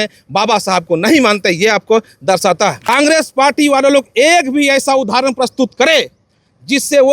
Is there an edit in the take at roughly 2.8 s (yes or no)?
yes